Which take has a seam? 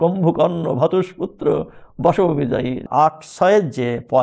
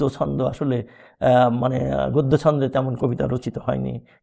first; 1 cut; at 2.8 s

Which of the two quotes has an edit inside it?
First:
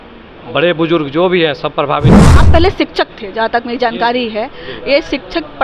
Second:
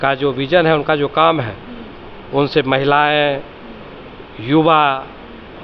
first; 1 cut; at 2.2 s

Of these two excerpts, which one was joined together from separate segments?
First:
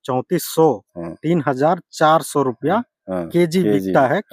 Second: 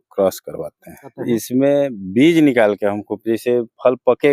second; 1 cut; at 1.2 s

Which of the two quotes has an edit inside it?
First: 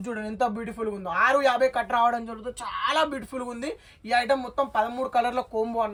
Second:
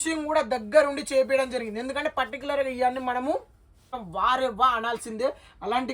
second; 1 cut; at 4.0 s

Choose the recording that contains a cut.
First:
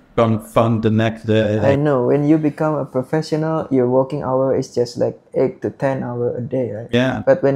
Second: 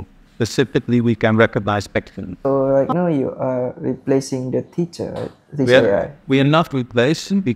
second; 1 cut; at 2.4 s

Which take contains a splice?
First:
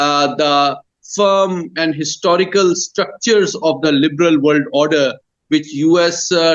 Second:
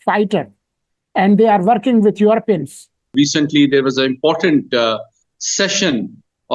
second; 1 cut; at 3.1 s

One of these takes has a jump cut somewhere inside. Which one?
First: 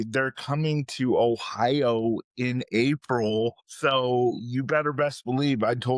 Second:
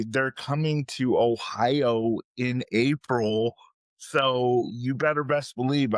first; 1 cut; at 3.7 s

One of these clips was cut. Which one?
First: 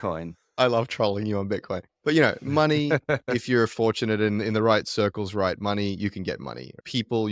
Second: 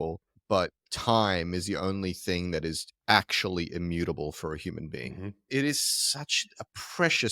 second; 1 cut; at 5.5 s

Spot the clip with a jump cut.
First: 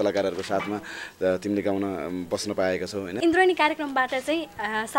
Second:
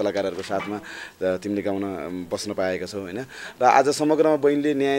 first; 1 cut; at 3.0 s

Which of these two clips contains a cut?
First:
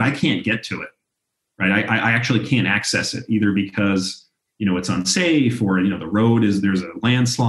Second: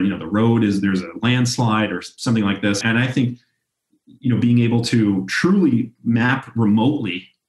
second; 1 cut; at 2.8 s

